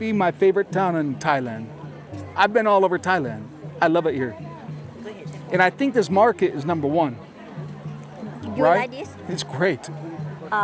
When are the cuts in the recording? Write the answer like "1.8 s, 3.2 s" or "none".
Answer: none